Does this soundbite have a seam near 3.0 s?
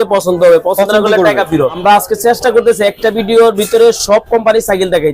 no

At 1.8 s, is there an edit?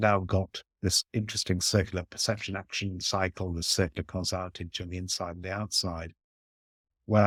no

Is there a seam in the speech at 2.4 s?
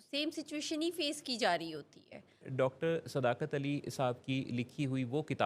yes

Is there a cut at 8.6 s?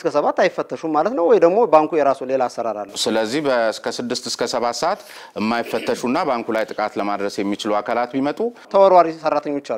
yes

